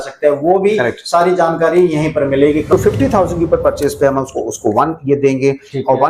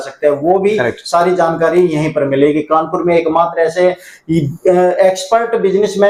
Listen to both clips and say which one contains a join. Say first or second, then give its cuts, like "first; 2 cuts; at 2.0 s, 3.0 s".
first; 1 cut; at 2.6 s